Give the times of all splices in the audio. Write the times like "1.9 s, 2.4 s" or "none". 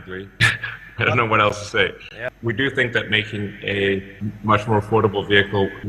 2.1 s